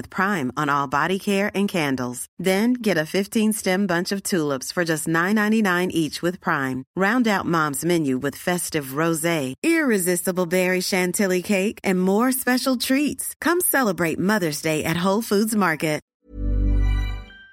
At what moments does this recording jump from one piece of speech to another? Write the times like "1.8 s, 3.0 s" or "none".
16.1 s